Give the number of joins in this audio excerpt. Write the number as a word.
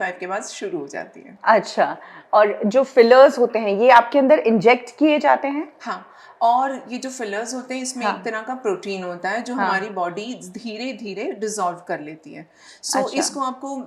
zero